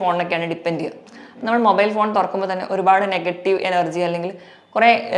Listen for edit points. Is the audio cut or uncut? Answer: uncut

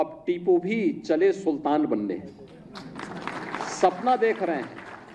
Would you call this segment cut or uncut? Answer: uncut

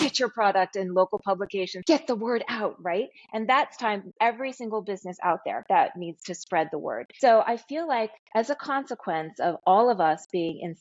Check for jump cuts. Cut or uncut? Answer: cut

